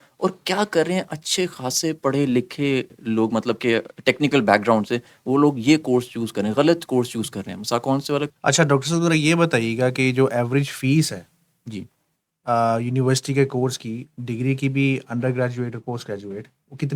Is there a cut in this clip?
yes; 1 cut; at 8.3 s

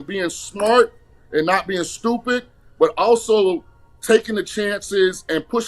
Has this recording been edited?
no; 0 cuts

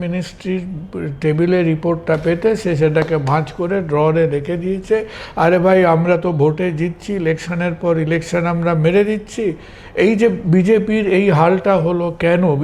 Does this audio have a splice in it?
no; 0 cuts

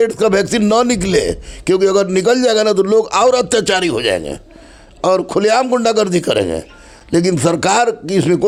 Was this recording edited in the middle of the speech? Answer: no; 0 cuts

